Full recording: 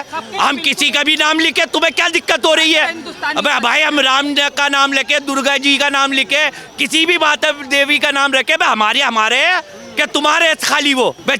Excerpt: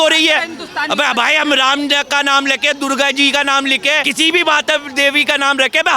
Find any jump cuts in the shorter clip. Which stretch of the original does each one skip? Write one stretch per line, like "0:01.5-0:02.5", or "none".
0:06.5-0:06.8